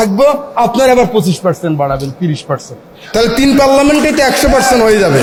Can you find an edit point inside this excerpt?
no; 0 cuts

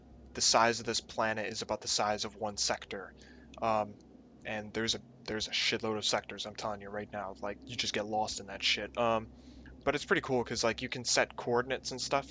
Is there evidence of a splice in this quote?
no; 0 cuts

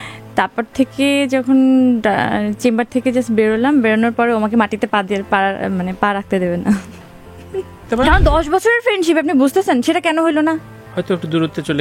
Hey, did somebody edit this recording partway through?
yes; 1 cut; at 7.9 s

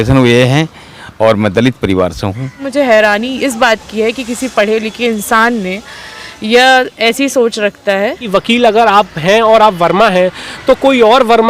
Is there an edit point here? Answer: yes; 2 cuts; at 2.6 s, 8.2 s

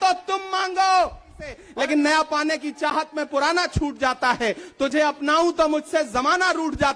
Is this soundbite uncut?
no; 1 cut; at 1.6 s

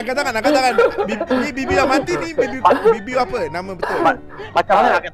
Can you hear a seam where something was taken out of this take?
no; 0 cuts

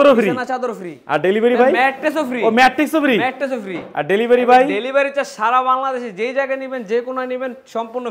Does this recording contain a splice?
no; 0 cuts

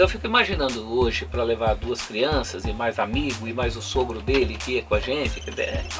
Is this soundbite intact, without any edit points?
yes; 0 cuts

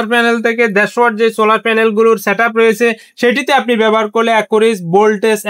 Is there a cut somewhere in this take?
no; 0 cuts

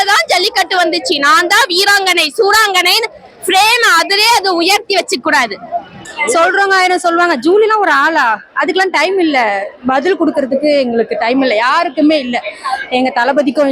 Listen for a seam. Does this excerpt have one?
yes; 1 cut; at 6.0 s

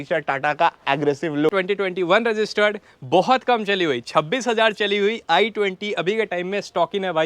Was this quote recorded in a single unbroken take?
no; 1 cut; at 1.5 s

